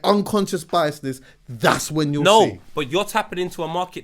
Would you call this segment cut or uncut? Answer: uncut